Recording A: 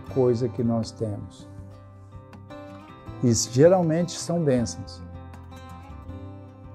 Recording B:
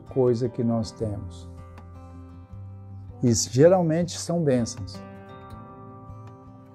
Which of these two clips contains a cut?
B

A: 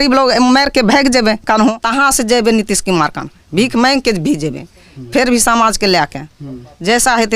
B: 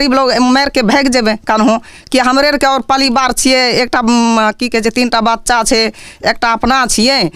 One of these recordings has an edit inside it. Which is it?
A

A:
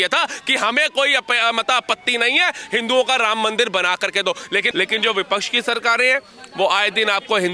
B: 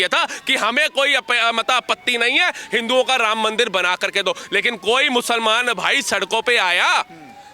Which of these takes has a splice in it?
A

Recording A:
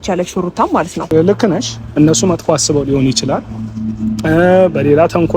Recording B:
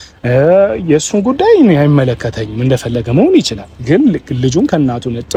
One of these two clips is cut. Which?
A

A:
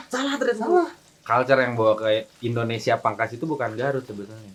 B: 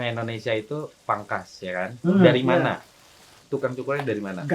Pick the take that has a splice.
B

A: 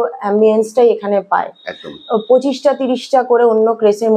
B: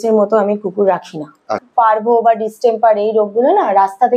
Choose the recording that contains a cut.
B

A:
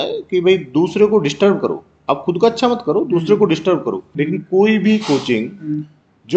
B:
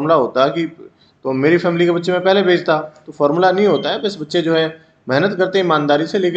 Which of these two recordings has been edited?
A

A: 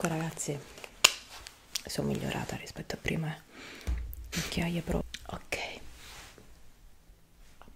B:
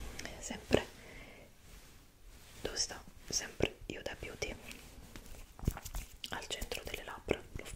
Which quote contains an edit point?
A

